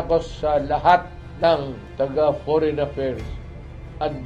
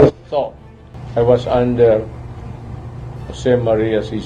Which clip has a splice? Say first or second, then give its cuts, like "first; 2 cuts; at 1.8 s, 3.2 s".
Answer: first; 1 cut; at 1.8 s